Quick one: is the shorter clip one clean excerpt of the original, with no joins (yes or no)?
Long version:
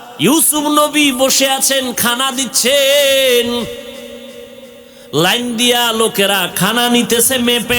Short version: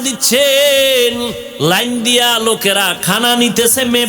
no